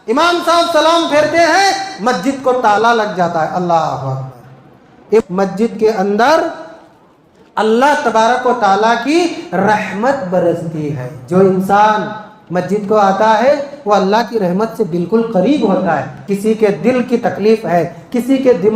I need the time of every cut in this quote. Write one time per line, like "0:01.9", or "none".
0:05.0
0:16.2

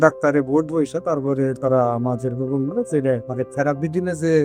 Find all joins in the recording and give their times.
0:03.3

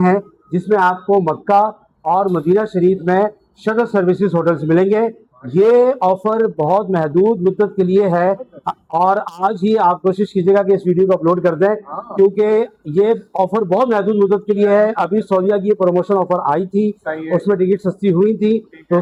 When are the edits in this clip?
none

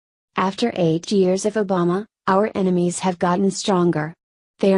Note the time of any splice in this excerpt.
none

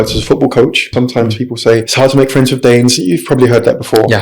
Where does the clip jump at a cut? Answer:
0:00.9
0:01.9

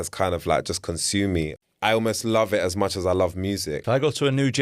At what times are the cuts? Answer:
0:01.6
0:03.7

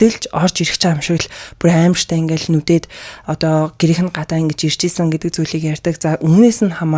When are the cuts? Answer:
none

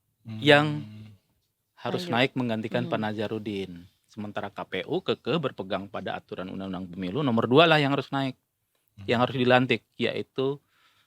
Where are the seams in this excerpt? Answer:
none

